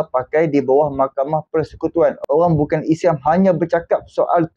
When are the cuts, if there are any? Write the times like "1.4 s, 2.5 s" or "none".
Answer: 2.2 s